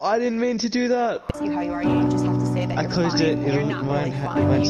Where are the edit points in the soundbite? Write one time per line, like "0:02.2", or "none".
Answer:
0:01.3